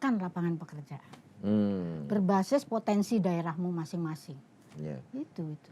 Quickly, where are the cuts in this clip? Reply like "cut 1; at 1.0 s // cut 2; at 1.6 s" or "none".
none